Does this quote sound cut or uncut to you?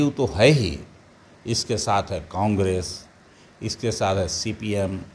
uncut